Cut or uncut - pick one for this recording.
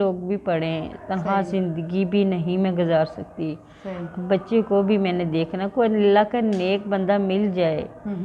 uncut